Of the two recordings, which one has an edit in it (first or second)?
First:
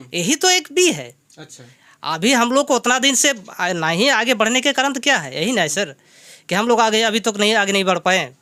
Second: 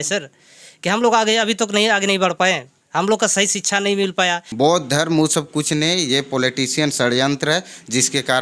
second